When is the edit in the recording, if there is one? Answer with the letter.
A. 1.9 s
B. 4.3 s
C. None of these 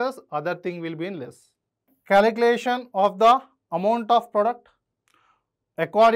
A